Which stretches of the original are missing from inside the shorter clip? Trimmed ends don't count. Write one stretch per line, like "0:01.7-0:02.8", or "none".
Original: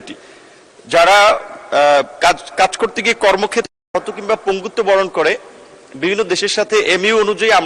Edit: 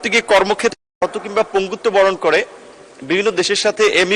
none